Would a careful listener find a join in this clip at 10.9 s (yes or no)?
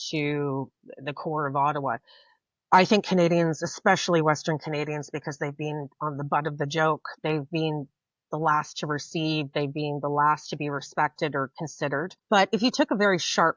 no